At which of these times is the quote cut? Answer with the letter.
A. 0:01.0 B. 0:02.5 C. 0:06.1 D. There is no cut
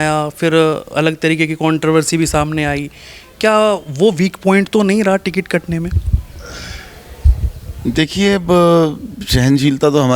D